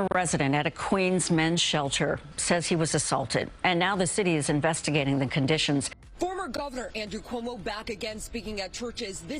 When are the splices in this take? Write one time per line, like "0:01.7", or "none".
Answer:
0:05.9